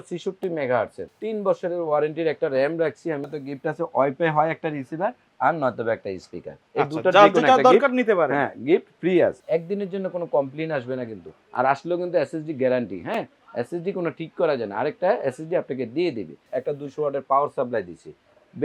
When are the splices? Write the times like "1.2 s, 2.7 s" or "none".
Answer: 1.0 s, 3.3 s, 9.4 s, 16.4 s

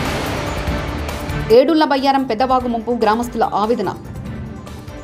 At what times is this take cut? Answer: none

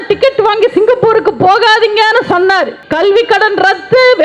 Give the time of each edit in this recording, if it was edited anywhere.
2.8 s

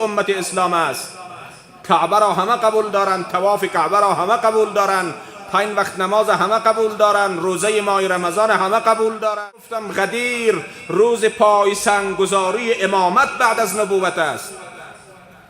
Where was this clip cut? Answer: 9.8 s

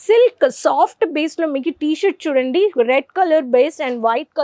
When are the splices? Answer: none

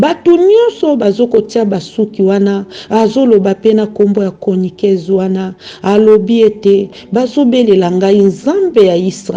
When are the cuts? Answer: none

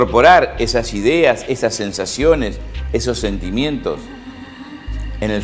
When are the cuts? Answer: 1.4 s

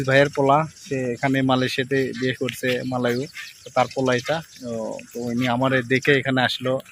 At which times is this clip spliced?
none

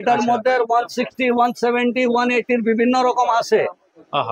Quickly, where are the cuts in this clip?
none

